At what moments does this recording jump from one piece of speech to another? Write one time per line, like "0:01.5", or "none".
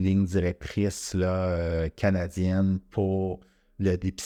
none